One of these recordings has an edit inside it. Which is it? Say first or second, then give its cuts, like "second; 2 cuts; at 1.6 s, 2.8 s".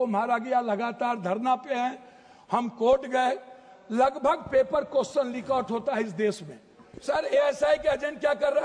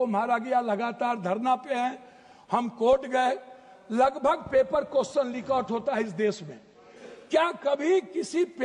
first; 1 cut; at 7.0 s